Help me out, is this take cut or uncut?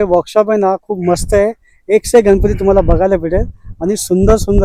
uncut